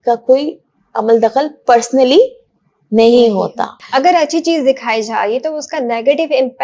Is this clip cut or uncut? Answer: cut